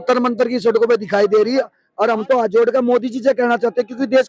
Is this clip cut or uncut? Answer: cut